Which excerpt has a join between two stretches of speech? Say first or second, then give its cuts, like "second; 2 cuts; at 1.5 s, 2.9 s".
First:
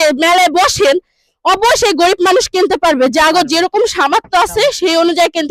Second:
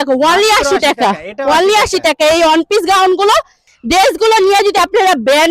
second; 1 cut; at 3.7 s